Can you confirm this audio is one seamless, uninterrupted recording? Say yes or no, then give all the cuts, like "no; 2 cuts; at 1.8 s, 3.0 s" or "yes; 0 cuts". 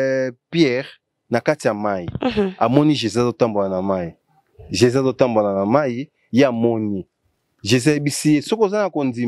yes; 0 cuts